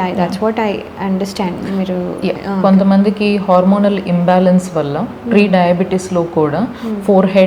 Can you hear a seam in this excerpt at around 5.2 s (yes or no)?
no